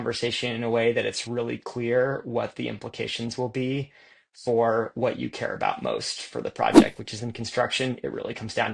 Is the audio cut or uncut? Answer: uncut